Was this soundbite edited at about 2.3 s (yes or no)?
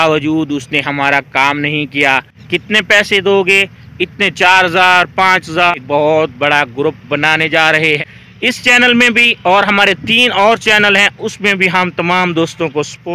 yes